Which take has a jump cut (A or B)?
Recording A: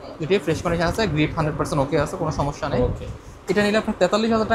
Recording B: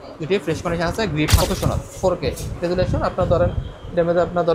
B